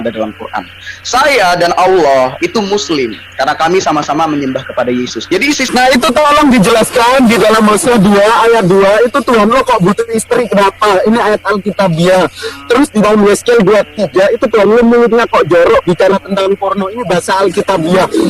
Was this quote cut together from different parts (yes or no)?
yes